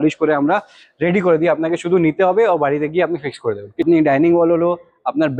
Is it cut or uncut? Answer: cut